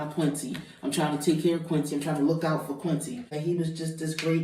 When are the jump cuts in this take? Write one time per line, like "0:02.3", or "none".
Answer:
0:03.3